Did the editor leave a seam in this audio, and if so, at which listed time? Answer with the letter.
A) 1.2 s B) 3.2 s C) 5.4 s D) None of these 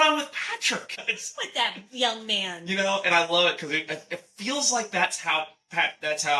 A